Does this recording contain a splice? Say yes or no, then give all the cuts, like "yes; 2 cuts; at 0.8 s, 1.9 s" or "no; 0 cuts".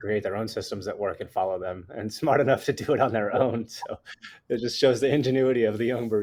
no; 0 cuts